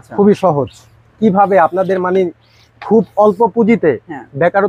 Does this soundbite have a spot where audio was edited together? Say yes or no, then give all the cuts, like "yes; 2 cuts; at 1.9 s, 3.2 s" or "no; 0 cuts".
yes; 1 cut; at 1.0 s